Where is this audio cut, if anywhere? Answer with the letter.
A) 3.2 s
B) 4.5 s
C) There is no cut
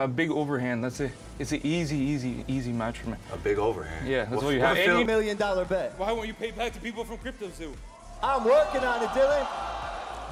C